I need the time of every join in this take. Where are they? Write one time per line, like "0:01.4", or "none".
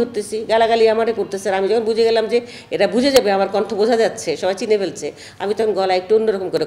none